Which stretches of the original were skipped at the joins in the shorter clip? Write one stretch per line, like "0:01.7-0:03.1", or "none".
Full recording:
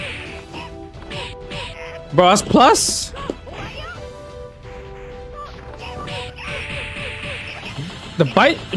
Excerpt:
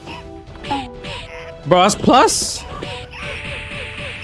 0:03.1-0:05.8